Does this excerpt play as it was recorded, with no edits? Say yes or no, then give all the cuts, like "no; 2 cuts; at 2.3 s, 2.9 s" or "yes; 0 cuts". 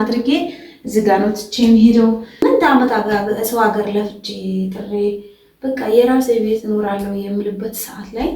no; 1 cut; at 2.4 s